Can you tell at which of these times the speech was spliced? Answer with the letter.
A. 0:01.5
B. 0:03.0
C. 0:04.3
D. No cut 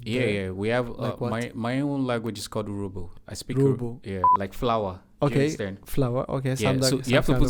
C